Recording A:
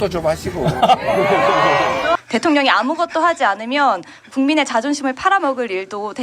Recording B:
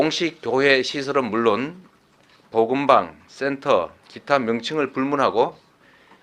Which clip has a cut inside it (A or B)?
A